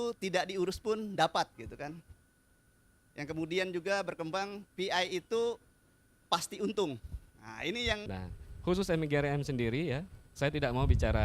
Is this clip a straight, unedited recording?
no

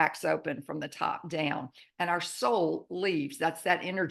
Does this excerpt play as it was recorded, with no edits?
yes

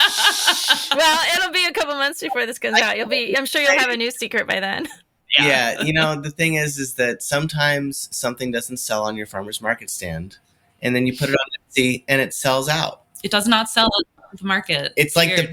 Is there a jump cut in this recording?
no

